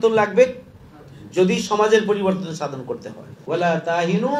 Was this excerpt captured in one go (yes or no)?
no